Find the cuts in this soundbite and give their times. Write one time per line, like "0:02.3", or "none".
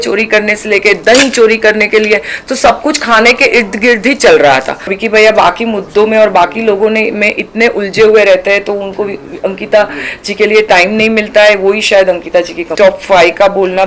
0:05.0
0:12.7